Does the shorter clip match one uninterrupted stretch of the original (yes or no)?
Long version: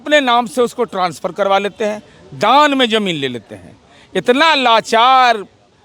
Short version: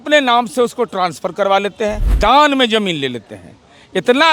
no